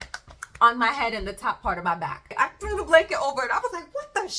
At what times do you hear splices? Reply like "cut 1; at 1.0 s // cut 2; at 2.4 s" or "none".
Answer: cut 1; at 2.3 s